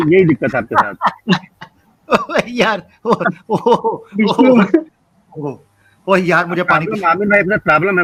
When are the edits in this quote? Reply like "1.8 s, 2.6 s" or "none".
none